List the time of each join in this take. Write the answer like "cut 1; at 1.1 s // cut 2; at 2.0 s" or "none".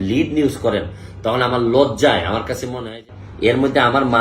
cut 1; at 3.0 s